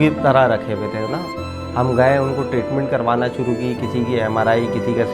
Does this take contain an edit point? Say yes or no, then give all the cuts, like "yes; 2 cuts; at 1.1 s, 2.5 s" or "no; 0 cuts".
no; 0 cuts